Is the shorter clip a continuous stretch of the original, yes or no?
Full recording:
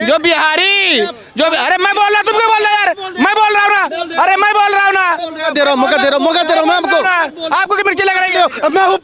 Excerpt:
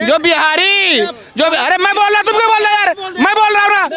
yes